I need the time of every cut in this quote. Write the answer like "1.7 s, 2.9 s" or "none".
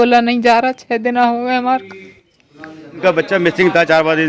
3.0 s